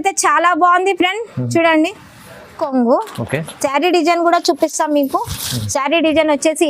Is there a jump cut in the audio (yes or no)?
yes